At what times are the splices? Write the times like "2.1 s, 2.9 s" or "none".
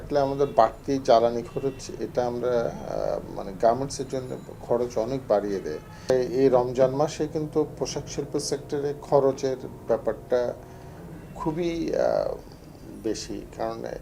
none